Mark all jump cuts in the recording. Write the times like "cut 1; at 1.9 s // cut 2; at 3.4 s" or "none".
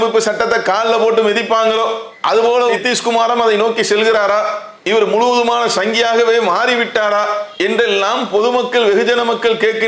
none

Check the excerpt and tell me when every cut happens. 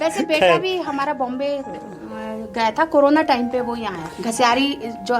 cut 1; at 3.9 s

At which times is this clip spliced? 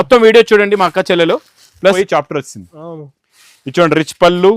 cut 1; at 1.9 s

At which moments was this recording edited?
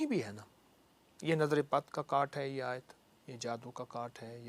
none

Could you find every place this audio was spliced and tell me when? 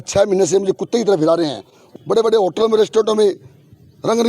cut 1; at 1.9 s

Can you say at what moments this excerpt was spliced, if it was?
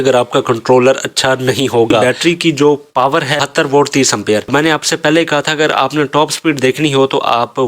cut 1; at 2.0 s

